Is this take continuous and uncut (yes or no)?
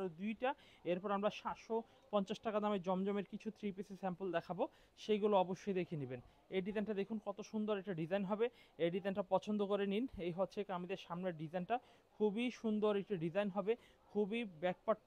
yes